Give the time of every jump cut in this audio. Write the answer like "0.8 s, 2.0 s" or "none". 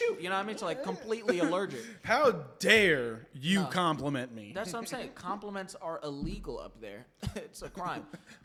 none

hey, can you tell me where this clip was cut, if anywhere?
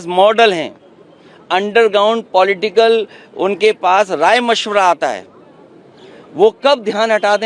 none

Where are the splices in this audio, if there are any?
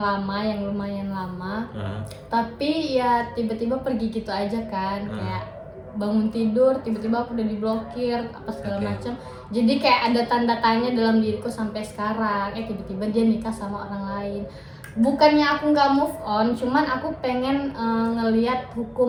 none

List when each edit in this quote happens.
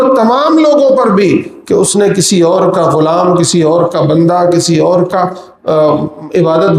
none

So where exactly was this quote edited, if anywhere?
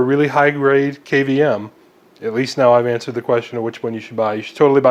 none

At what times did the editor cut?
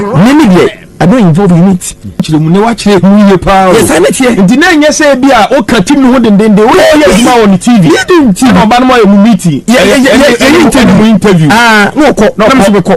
2.3 s

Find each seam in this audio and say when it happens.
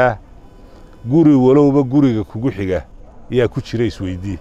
none

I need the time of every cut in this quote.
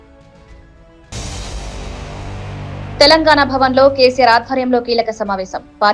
1.1 s, 2.6 s

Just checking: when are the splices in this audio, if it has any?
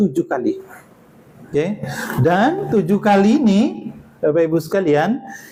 none

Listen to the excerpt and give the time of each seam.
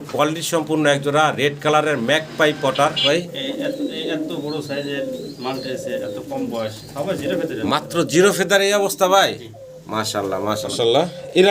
3.1 s, 10.7 s

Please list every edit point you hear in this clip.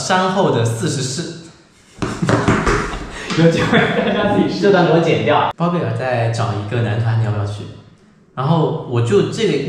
5.5 s

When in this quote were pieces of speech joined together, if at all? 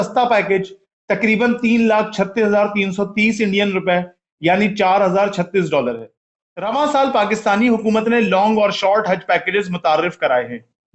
6.4 s

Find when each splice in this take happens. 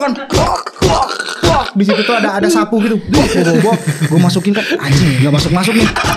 none

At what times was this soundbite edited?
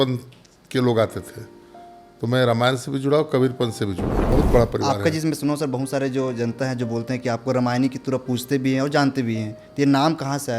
4.1 s

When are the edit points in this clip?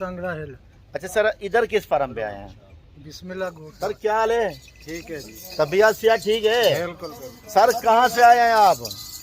3.7 s

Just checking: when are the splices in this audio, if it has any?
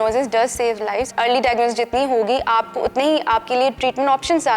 1.1 s

